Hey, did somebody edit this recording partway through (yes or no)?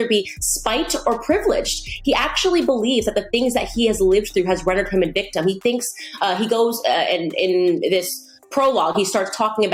no